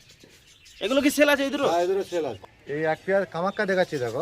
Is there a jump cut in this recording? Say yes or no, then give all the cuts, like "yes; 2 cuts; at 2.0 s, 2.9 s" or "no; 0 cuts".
yes; 1 cut; at 2.3 s